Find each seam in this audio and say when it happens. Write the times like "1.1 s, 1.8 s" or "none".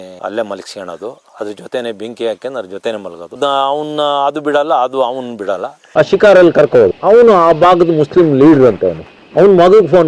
3.3 s, 5.8 s